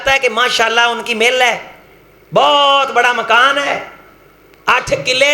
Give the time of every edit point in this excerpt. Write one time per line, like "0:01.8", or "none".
none